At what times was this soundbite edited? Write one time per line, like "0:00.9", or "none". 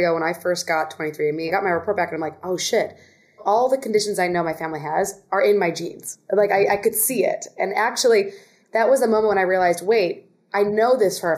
0:01.5
0:03.4